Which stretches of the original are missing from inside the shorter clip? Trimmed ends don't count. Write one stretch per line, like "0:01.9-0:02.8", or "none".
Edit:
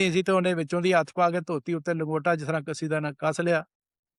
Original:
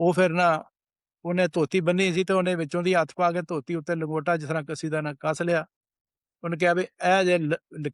none